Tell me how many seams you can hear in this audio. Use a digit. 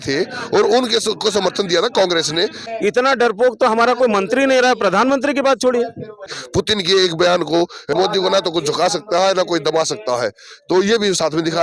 3